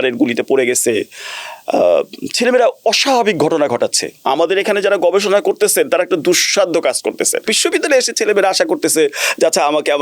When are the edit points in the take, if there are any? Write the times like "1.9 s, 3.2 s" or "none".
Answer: 4.1 s, 7.5 s

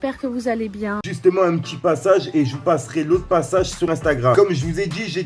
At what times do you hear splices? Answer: 1.0 s, 4.3 s

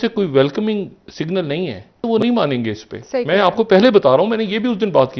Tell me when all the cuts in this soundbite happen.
2.0 s

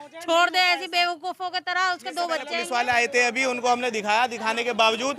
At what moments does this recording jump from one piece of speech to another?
2.6 s

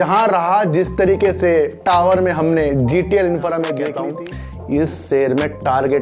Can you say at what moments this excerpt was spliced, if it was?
4.0 s

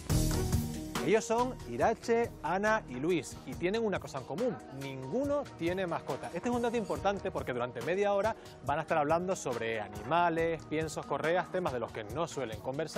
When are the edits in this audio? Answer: 0.9 s

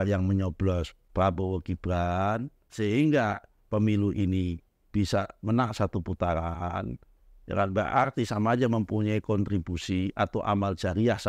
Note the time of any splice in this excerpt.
1.0 s, 2.6 s

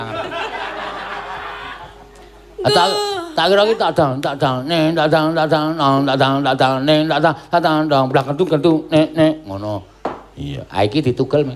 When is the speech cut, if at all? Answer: none

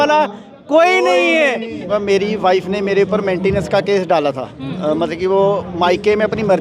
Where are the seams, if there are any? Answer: 1.9 s

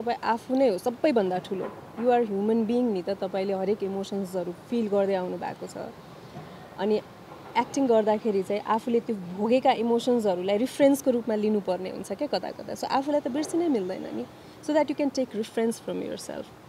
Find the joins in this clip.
none

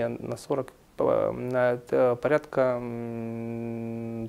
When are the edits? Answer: none

